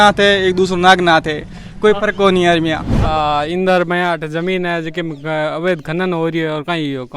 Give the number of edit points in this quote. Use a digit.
1